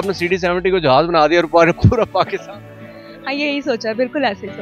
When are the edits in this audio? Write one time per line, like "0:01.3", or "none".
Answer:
none